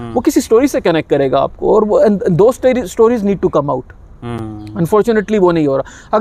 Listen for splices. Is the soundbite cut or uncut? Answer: uncut